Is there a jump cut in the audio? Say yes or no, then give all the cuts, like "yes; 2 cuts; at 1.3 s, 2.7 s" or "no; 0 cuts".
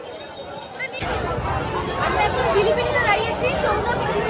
yes; 1 cut; at 1.0 s